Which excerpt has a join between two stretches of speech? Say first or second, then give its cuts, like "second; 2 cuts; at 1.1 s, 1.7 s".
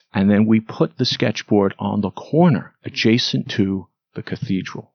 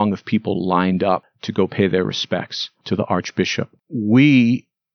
second; 2 cuts; at 1.4 s, 3.8 s